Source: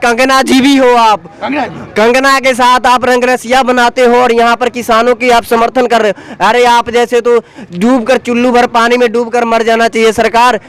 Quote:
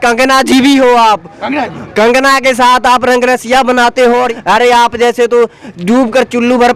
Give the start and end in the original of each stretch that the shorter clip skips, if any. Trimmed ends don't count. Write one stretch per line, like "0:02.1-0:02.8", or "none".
0:04.3-0:06.2